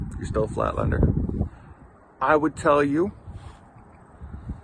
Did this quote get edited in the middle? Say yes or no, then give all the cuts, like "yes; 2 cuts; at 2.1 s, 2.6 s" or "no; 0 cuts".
yes; 1 cut; at 1.5 s